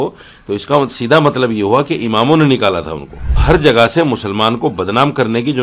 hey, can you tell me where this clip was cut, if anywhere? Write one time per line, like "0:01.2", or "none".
0:03.3